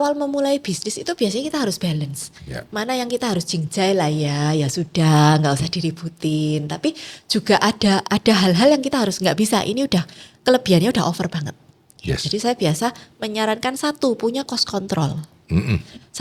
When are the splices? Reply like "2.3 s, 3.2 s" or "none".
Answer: none